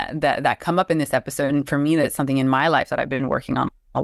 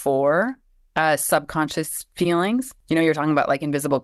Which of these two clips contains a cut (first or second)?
second